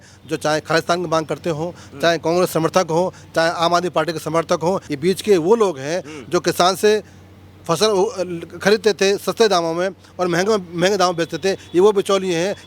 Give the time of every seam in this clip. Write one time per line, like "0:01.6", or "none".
0:04.9